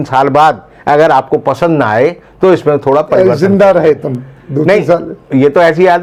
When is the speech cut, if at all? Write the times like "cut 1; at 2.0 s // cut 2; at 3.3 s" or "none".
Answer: none

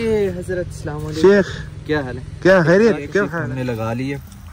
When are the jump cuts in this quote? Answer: cut 1; at 3.5 s

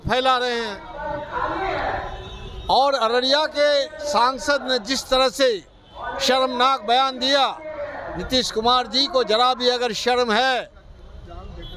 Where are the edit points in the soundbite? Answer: none

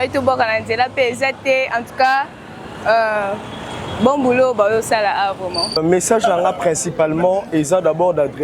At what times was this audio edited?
cut 1; at 5.7 s

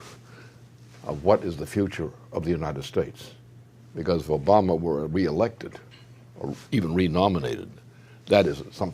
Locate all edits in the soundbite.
cut 1; at 1.4 s

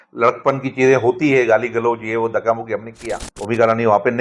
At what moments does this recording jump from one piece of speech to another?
cut 1; at 3.3 s

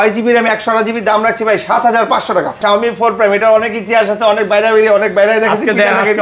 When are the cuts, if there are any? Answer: cut 1; at 2.6 s

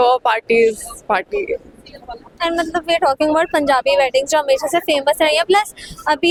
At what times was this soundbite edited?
none

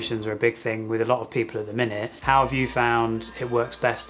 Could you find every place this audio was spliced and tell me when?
cut 1; at 2.1 s

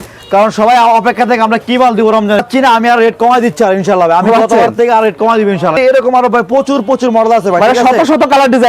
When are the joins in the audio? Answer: cut 1; at 2.5 s // cut 2; at 5.7 s

